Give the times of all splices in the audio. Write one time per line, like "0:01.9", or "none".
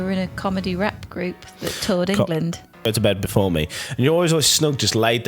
0:02.9